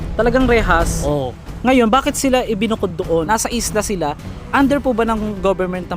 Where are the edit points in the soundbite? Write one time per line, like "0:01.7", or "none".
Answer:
0:03.0
0:04.3